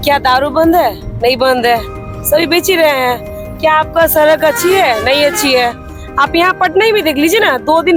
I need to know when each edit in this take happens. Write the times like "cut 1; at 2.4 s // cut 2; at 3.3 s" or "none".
none